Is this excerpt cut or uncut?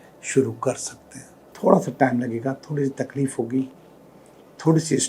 cut